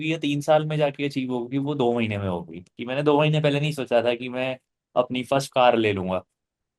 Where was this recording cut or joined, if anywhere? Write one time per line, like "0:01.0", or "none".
0:02.7